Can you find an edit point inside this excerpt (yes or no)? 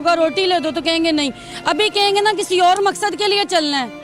no